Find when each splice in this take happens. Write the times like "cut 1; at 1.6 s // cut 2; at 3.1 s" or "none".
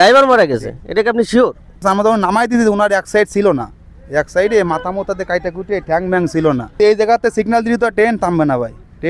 cut 1; at 1.8 s // cut 2; at 6.7 s